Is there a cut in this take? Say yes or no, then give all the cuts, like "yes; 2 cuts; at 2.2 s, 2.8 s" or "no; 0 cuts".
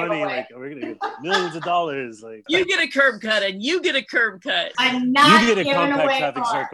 yes; 2 cuts; at 2.5 s, 4.7 s